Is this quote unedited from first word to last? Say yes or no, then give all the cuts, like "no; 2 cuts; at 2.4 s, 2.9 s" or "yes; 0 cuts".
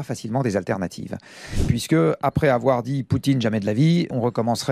no; 1 cut; at 1.5 s